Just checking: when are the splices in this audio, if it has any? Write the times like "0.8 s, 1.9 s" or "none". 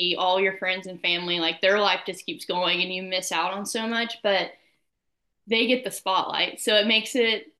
none